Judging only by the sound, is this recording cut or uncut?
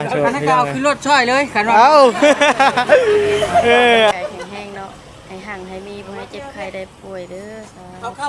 cut